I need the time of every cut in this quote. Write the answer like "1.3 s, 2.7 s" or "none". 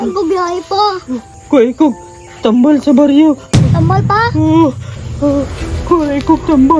1.3 s, 3.8 s